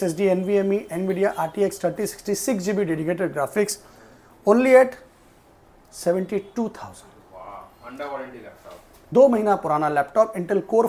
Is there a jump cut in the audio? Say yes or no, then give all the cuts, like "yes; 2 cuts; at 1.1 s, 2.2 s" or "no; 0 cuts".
no; 0 cuts